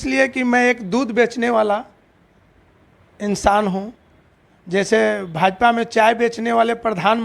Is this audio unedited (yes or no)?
yes